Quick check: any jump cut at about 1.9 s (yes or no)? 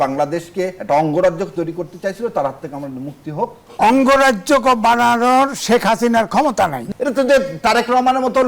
no